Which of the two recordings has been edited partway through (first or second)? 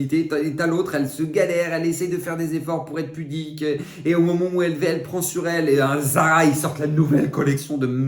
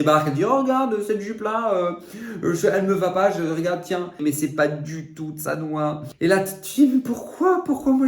second